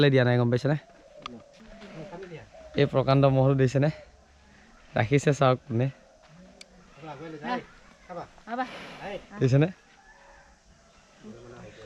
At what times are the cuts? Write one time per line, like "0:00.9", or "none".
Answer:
0:01.6